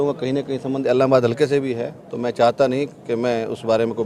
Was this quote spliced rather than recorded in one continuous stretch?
no; 0 cuts

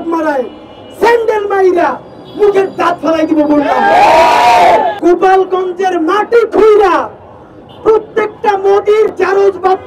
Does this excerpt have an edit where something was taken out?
yes; 1 cut; at 5.0 s

